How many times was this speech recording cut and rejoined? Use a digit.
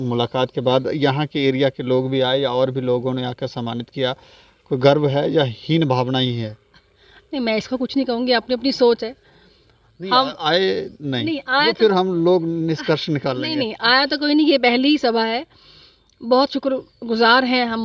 0